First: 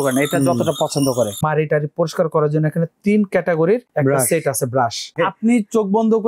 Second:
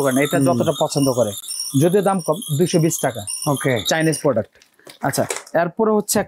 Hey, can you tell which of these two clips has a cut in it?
first; 2 cuts; at 1.4 s, 5.2 s

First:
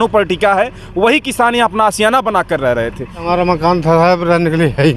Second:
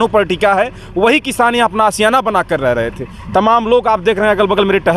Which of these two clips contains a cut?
first; 1 cut; at 3.3 s

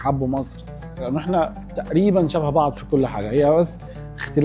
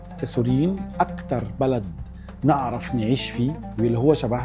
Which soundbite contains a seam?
first; 1 cut; at 1.0 s

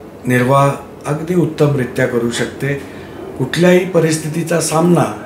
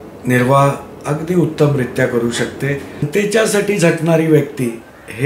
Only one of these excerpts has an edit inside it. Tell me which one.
second; 1 cut; at 3.1 s

